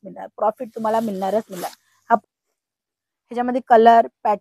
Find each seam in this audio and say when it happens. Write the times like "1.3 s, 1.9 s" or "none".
2.2 s